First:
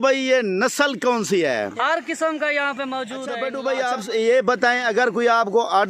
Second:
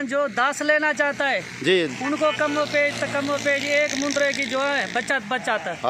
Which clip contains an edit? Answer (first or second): first